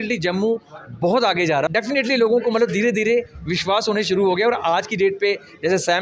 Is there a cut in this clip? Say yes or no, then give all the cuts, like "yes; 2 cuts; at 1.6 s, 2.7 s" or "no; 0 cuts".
yes; 1 cut; at 1.7 s